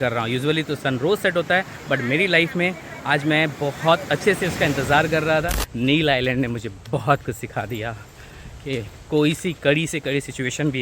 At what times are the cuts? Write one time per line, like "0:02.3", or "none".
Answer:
0:05.6